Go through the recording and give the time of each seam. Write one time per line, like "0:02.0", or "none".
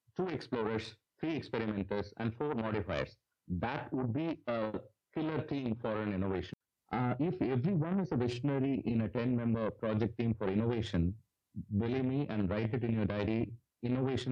0:06.5